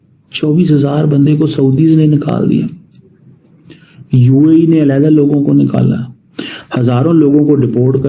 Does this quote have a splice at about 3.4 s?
no; 0 cuts

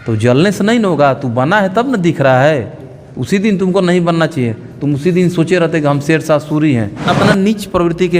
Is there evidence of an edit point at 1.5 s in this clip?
no; 1 cut; at 7.1 s

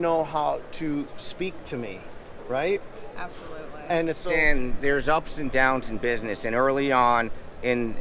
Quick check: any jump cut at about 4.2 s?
yes; 1 cut; at 4.2 s

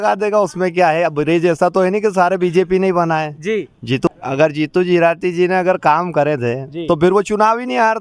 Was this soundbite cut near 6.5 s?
no; 1 cut; at 4.1 s

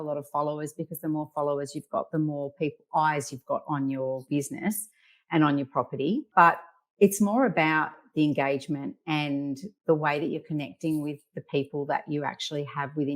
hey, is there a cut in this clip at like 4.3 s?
yes; 3 cuts; at 4.3 s, 6.3 s, 9.7 s

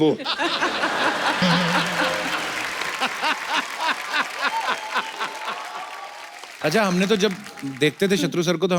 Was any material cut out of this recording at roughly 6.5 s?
yes; 1 cut; at 6.5 s

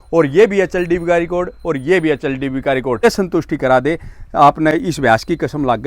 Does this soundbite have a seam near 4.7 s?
yes; 2 cuts; at 3.0 s, 4.7 s

